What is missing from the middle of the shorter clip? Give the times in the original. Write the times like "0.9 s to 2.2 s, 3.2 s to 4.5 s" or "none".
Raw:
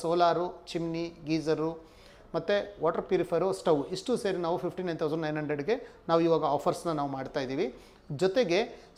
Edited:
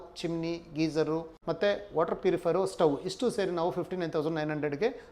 1.8 s to 2.2 s